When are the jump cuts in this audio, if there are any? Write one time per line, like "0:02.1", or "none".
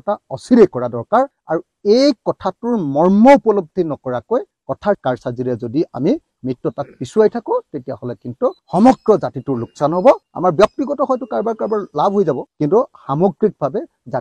none

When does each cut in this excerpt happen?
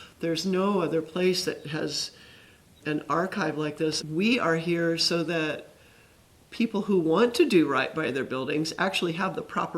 0:04.0

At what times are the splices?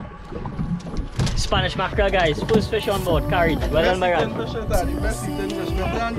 none

